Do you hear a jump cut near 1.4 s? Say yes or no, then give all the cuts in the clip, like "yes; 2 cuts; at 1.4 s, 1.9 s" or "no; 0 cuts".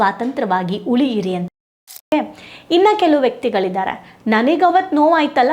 yes; 1 cut; at 1.4 s